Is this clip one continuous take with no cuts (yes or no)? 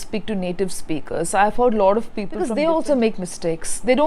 no